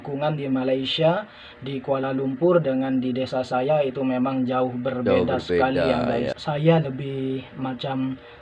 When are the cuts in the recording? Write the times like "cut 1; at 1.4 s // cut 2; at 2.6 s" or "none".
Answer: cut 1; at 6.4 s